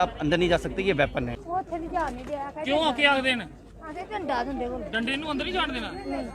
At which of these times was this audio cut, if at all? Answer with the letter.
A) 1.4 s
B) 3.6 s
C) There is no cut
A